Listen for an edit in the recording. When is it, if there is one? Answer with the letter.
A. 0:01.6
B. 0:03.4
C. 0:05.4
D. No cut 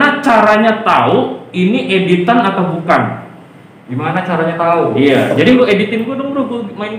C